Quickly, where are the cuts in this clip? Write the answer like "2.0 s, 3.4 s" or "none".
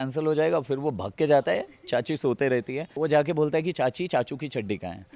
2.9 s